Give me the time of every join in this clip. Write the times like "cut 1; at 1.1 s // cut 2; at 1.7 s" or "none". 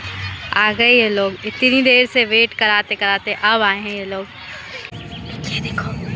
cut 1; at 4.9 s